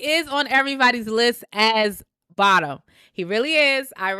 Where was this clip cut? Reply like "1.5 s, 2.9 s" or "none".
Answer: none